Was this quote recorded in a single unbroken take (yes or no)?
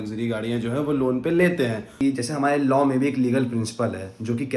no